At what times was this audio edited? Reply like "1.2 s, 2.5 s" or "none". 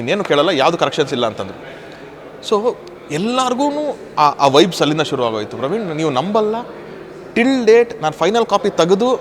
none